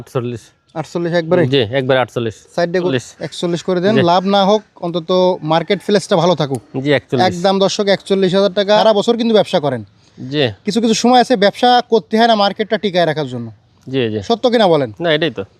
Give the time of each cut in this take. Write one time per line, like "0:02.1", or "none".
0:02.9
0:08.8